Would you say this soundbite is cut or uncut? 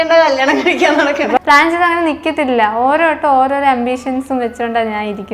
cut